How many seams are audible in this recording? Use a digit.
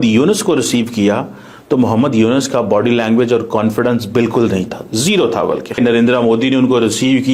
1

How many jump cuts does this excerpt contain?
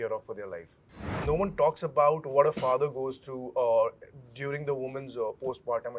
1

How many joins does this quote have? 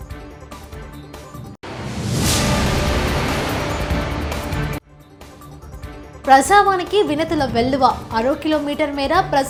0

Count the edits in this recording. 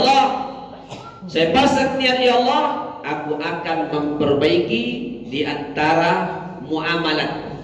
0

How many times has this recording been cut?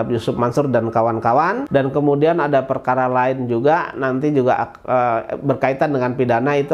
1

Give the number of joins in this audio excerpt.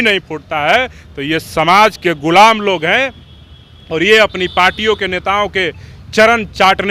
0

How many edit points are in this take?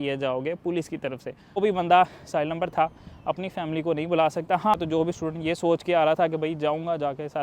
2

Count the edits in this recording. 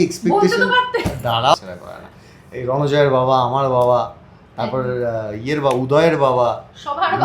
1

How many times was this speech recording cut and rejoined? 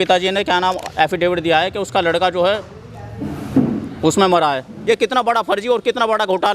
1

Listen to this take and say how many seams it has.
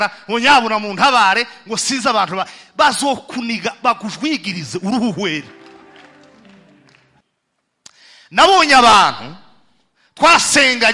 1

